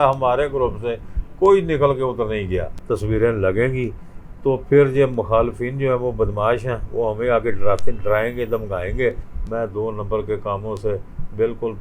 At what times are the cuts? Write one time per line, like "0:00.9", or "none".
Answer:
0:02.7
0:09.3